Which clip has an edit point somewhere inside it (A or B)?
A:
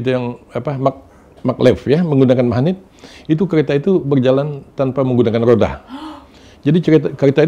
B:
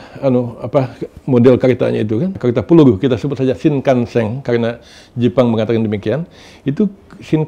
B